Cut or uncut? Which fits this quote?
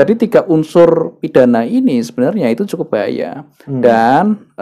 uncut